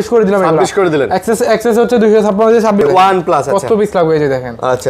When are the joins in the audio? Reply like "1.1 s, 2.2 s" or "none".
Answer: 2.8 s